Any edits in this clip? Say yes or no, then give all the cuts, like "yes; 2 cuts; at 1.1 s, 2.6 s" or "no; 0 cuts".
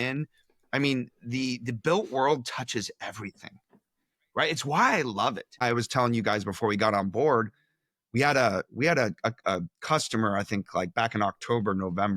yes; 1 cut; at 5.6 s